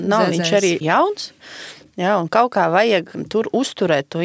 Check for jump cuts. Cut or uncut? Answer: cut